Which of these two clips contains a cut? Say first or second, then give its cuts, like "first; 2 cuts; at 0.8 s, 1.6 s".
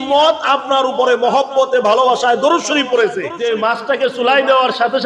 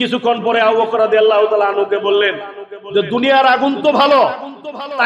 first; 1 cut; at 3.3 s